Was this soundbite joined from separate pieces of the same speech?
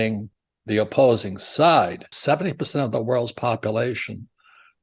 yes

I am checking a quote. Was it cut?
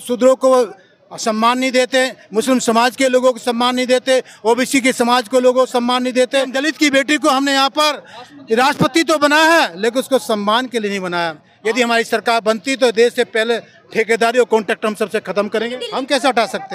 yes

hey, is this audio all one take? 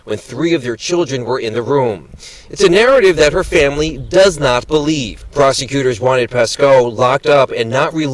yes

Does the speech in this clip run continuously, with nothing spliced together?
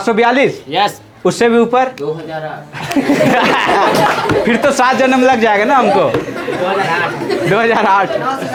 yes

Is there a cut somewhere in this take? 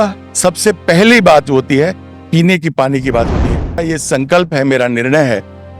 yes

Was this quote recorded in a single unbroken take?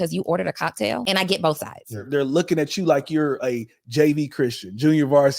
no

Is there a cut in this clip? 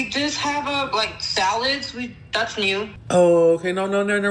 yes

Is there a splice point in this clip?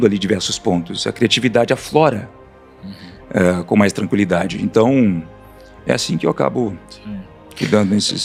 no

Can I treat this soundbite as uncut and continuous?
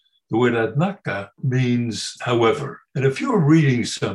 no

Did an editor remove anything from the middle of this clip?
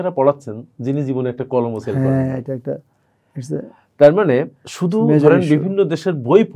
no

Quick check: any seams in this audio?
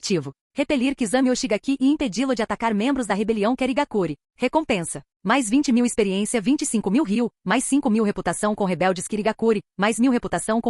yes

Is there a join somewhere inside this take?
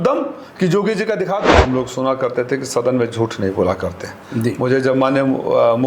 yes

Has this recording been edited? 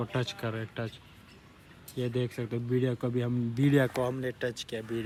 no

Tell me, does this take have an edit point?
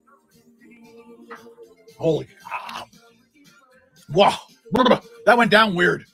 no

